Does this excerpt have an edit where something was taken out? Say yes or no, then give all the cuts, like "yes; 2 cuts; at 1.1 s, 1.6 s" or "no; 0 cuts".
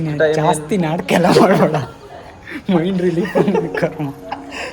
yes; 1 cut; at 2.5 s